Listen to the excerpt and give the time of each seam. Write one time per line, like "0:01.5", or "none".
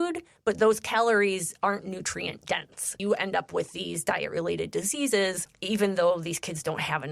0:03.0
0:05.5